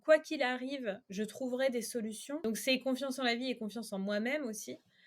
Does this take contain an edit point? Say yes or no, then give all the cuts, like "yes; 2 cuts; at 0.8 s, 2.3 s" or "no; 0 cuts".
yes; 2 cuts; at 1.0 s, 2.4 s